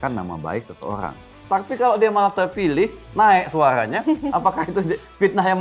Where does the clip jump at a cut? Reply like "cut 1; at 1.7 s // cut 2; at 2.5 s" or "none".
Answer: cut 1; at 1.3 s